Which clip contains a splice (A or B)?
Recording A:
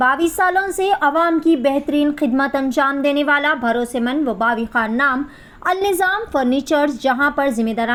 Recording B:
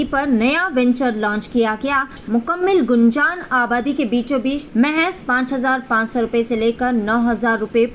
B